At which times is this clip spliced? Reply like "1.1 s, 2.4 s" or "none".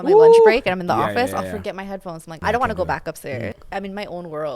2.4 s, 3.6 s